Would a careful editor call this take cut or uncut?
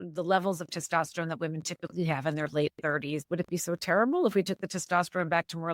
cut